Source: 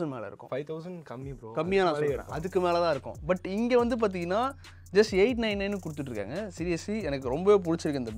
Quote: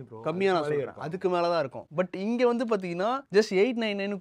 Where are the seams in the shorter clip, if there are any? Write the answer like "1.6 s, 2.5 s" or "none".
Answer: 3.2 s